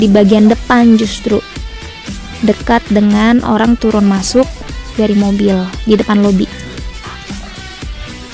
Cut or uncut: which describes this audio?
cut